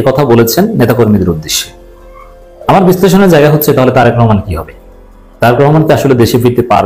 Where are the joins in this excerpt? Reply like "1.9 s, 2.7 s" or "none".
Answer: none